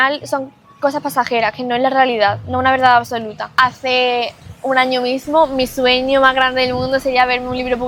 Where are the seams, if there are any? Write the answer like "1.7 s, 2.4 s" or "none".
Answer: 3.5 s, 4.4 s